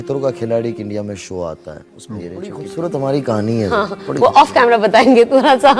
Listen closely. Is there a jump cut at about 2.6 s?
yes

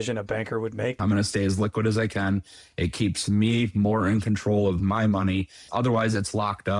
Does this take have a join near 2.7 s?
no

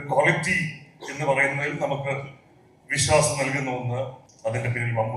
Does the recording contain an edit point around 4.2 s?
yes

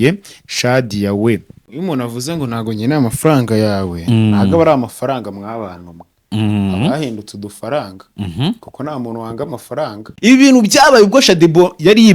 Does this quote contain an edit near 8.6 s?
no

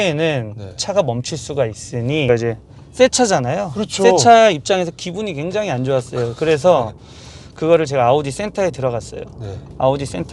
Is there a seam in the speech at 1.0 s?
no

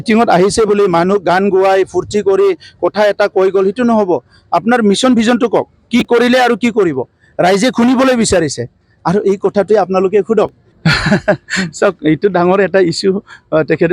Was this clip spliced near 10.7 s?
yes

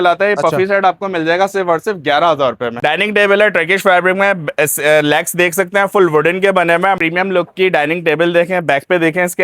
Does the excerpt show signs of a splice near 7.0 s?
yes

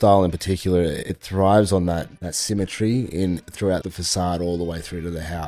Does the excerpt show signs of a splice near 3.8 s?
yes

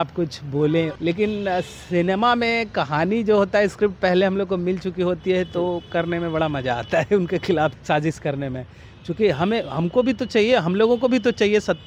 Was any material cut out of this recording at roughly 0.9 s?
yes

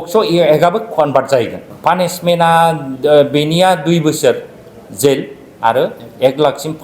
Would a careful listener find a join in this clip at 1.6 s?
yes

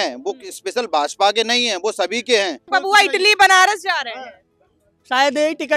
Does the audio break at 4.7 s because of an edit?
no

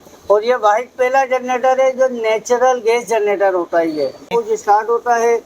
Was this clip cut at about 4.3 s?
yes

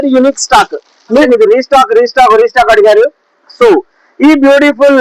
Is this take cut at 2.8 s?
no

